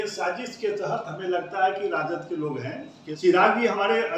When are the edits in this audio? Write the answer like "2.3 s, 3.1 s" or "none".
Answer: 3.0 s